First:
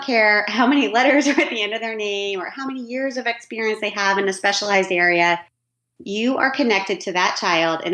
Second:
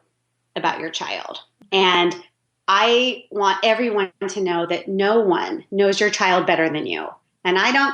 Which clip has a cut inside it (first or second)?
second